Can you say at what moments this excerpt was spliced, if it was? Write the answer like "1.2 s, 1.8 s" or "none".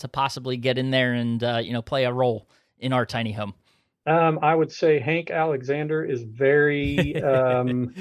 none